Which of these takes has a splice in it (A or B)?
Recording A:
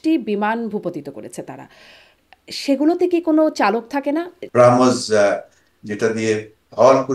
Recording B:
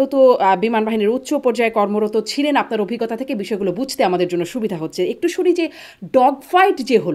A